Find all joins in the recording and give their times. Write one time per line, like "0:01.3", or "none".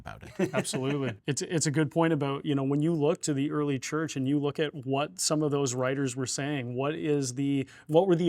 0:01.2